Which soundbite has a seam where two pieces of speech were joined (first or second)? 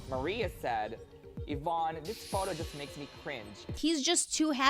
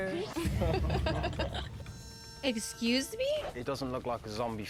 first